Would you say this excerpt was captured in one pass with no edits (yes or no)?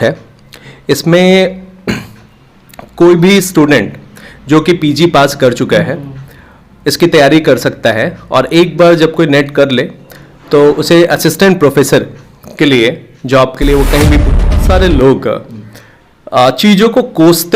no